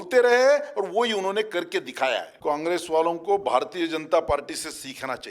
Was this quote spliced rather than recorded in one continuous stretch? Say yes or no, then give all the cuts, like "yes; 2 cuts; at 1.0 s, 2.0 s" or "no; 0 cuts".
yes; 1 cut; at 2.3 s